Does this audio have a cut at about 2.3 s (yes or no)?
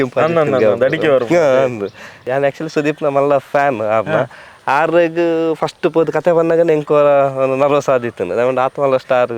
yes